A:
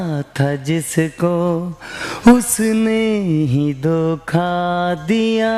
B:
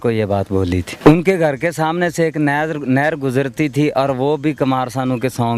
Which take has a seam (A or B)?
B